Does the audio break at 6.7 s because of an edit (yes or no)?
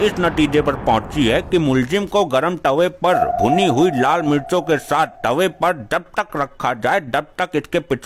no